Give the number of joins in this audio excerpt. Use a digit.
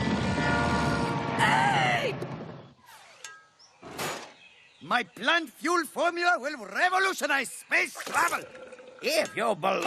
0